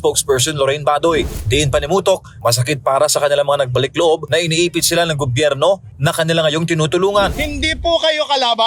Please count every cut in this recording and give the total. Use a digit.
2